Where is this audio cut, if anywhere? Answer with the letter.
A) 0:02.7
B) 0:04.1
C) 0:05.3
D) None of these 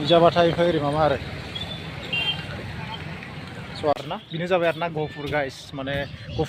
B